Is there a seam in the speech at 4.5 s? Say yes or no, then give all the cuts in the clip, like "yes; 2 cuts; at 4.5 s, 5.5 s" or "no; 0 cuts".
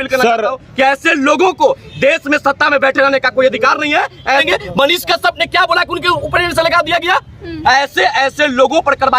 yes; 2 cuts; at 4.5 s, 7.5 s